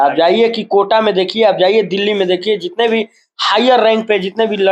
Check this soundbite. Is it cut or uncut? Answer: uncut